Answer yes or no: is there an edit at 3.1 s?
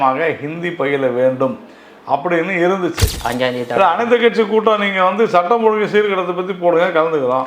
yes